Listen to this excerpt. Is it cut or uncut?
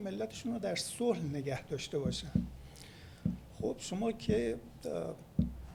uncut